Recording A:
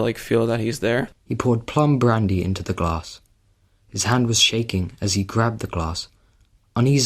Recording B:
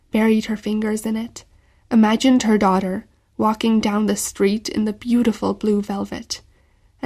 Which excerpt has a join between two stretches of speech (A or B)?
A